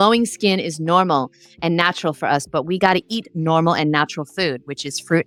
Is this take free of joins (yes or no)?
yes